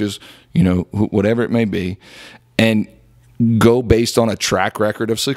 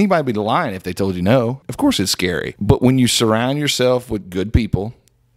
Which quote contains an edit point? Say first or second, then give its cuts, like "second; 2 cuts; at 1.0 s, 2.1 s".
second; 2 cuts; at 1.6 s, 2.5 s